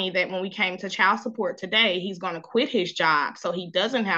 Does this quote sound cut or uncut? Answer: uncut